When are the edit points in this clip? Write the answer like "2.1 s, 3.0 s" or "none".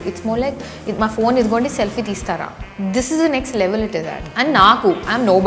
none